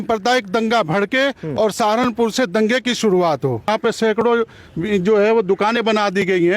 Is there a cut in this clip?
yes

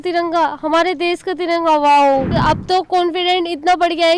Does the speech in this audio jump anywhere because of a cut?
yes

